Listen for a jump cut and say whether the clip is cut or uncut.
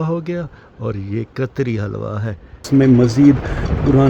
cut